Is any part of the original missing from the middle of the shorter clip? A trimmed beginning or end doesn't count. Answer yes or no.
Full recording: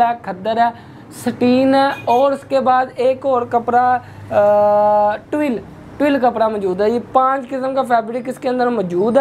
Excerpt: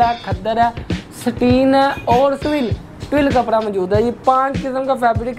yes